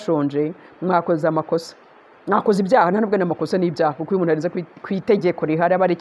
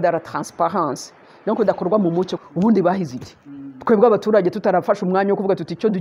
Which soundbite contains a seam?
second; 1 cut; at 2.4 s

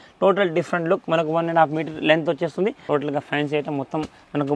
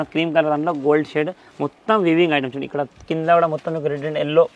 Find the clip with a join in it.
first; 1 cut; at 2.8 s

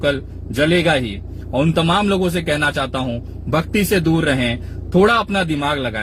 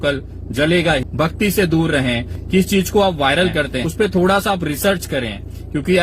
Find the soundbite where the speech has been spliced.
second; 3 cuts; at 1.1 s, 2.3 s, 3.8 s

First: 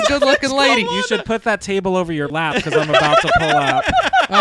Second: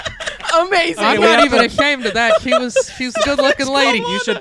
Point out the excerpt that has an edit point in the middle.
first; 1 cut; at 2.3 s

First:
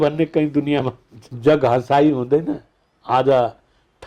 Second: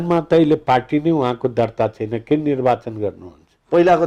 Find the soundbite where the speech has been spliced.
first; 1 cut; at 1.2 s

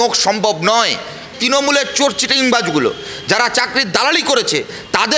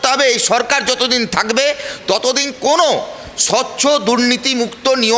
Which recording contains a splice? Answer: first; 1 cut; at 1.2 s

